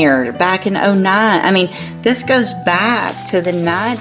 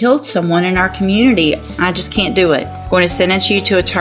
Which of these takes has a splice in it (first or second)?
second